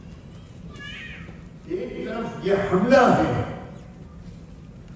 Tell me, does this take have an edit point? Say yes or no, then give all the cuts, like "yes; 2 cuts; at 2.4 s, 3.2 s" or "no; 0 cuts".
yes; 1 cut; at 1.7 s